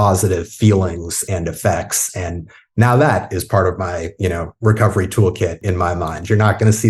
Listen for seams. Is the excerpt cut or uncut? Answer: cut